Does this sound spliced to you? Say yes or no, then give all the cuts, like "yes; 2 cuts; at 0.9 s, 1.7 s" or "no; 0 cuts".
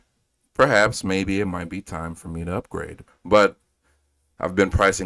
yes; 1 cut; at 3.1 s